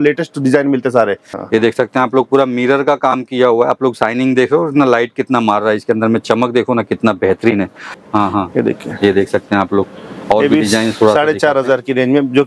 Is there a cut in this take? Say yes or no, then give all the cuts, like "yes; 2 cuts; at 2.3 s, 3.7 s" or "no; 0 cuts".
yes; 2 cuts; at 1.3 s, 8.0 s